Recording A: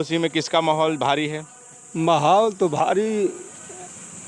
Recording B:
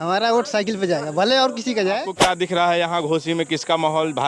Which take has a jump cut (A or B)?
B